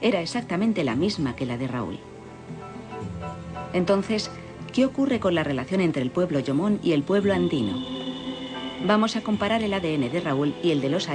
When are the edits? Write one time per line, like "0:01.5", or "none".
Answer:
0:01.9